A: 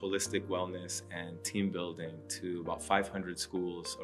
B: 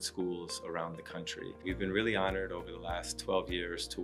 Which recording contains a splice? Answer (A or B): B